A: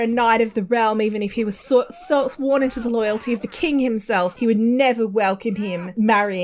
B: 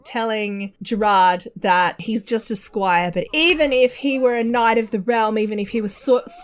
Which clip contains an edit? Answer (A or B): B